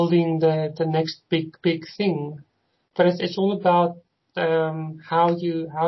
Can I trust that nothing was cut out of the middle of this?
yes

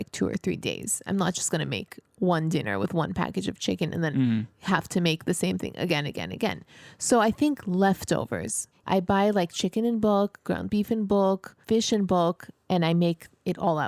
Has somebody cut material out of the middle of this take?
yes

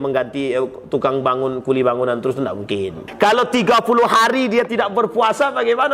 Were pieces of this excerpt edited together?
yes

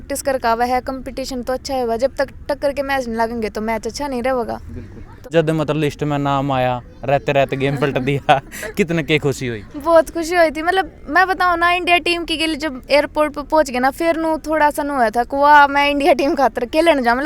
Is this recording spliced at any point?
yes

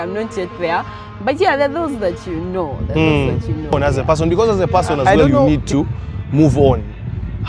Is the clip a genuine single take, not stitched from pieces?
no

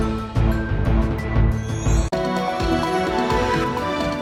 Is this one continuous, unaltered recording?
yes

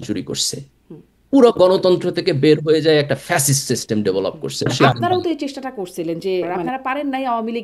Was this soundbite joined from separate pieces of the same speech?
yes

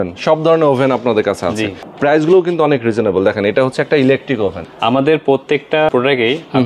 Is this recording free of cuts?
no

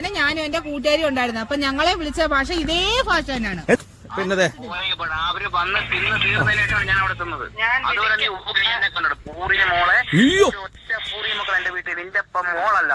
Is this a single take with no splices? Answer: no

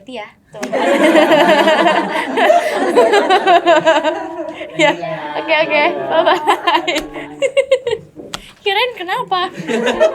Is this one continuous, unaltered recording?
yes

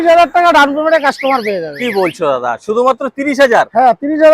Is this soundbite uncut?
yes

